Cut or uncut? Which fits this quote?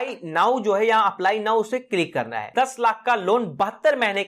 cut